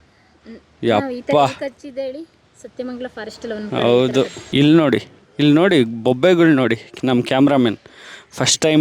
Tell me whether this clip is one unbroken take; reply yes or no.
no